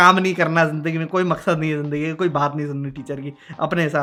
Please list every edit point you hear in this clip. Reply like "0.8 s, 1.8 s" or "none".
none

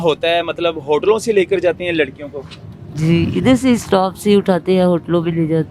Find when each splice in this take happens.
none

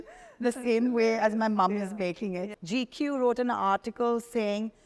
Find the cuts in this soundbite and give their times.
2.5 s

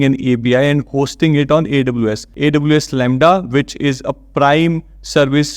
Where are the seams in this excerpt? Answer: 2.3 s

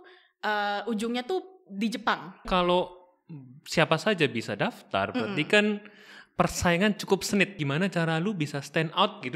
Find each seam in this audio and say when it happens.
2.5 s, 7.6 s

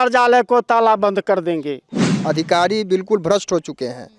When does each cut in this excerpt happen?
2.1 s

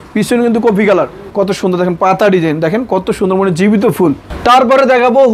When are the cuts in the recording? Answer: 1.2 s, 4.3 s

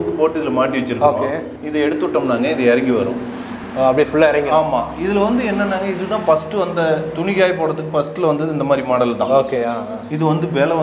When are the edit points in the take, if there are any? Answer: none

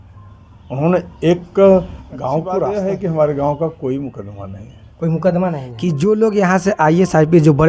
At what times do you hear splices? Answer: 2.6 s, 5.7 s

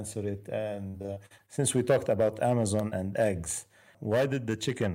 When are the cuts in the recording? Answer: 3.9 s

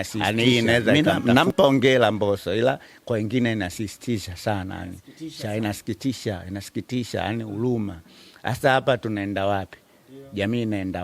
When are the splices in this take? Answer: 0.9 s

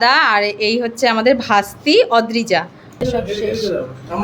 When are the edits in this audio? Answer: 3.0 s

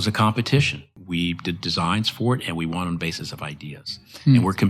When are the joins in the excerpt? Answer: 0.9 s

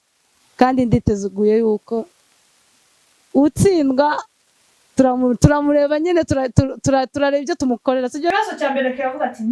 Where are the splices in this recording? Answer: 8.3 s

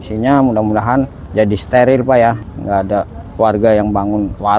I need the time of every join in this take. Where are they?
1.2 s, 2.4 s

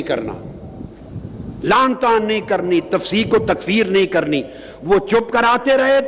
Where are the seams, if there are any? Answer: none

